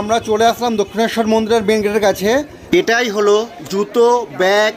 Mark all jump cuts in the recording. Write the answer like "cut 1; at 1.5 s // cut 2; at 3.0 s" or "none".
cut 1; at 2.5 s